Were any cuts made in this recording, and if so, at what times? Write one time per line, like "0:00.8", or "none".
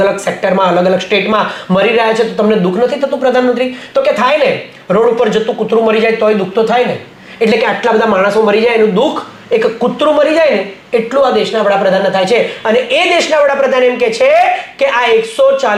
none